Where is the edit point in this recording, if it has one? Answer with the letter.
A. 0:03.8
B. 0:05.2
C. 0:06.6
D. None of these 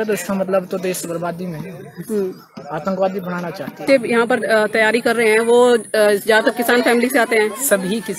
A